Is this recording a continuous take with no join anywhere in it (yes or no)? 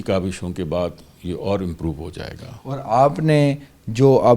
yes